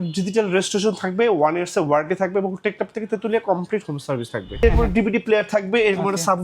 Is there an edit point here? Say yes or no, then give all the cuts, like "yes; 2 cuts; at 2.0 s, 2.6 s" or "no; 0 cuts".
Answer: yes; 1 cut; at 4.6 s